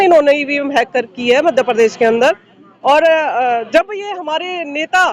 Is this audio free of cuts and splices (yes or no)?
yes